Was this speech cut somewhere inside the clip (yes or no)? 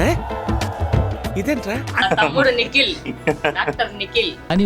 yes